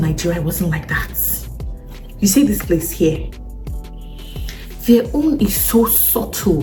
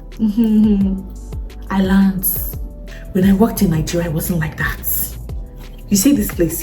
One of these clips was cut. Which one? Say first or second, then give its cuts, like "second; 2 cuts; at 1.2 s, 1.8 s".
second; 1 cut; at 2.7 s